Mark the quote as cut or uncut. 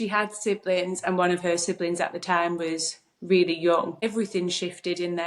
cut